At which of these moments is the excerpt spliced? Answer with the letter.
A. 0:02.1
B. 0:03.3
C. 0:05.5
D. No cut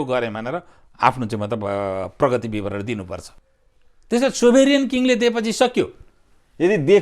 B